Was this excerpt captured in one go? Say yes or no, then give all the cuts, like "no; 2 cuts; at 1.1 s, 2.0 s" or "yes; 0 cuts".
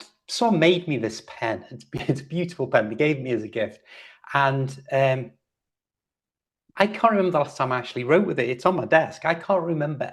yes; 0 cuts